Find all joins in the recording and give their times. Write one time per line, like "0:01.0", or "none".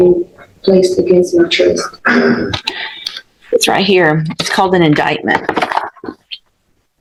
none